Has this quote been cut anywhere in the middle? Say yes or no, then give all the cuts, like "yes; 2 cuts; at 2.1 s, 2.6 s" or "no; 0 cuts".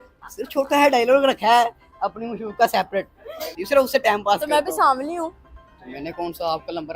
yes; 1 cut; at 3.6 s